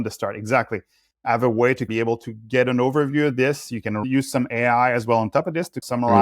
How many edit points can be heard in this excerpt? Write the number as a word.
two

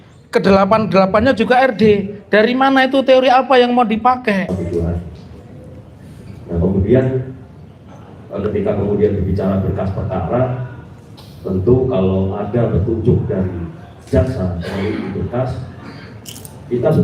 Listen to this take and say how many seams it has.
one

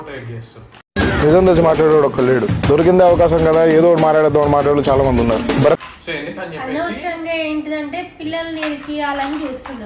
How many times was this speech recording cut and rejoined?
zero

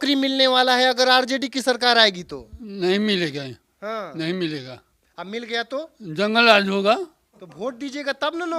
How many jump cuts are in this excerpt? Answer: zero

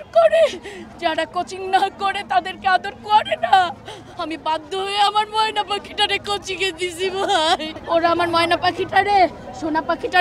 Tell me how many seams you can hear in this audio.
one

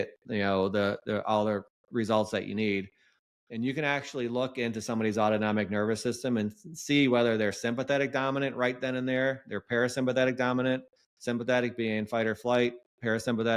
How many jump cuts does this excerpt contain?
zero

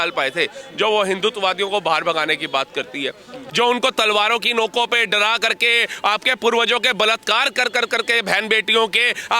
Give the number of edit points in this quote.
one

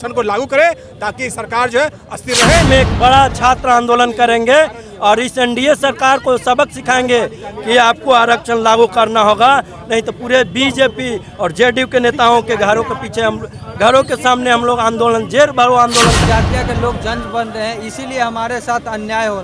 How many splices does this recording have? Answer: two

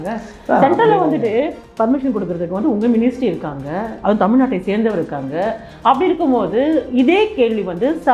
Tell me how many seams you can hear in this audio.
one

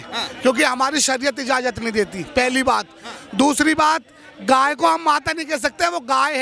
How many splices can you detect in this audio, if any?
zero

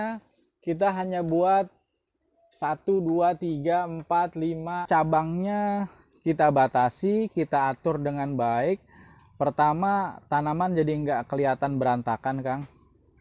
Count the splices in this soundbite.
one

